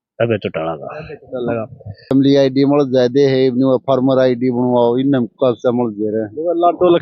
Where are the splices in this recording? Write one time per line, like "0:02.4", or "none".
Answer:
0:02.1